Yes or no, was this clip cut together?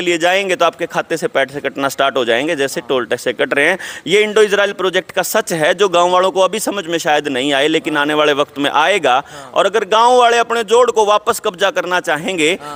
no